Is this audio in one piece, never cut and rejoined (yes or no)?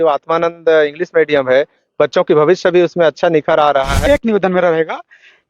no